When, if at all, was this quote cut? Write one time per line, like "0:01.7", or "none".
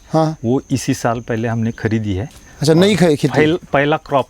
none